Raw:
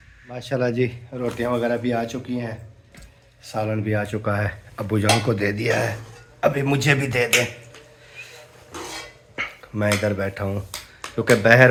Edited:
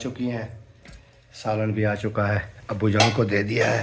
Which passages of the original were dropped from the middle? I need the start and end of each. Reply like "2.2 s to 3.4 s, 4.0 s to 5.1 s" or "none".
none